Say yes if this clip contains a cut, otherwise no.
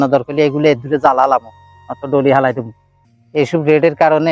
yes